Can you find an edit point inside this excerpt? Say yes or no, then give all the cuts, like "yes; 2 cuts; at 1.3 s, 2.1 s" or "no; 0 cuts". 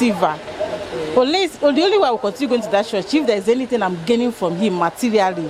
no; 0 cuts